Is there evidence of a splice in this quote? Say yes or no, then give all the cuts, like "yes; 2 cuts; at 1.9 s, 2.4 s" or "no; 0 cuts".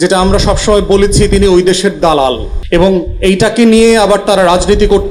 yes; 1 cut; at 2.5 s